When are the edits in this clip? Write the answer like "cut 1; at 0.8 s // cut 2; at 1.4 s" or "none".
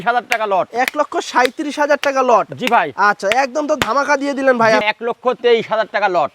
cut 1; at 4.8 s